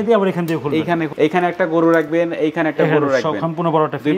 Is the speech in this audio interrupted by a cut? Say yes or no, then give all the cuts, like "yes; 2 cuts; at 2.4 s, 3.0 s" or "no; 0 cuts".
yes; 1 cut; at 1.1 s